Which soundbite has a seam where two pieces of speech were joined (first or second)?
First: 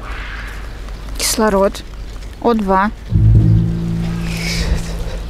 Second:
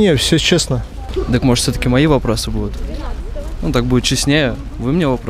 second